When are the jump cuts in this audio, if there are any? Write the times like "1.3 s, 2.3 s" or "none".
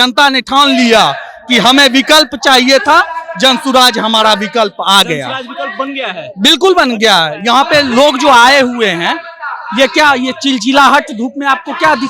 none